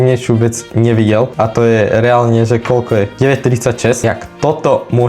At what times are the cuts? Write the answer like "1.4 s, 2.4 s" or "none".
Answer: 1.3 s, 3.1 s, 4.0 s